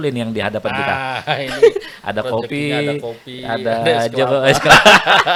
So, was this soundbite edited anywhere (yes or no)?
no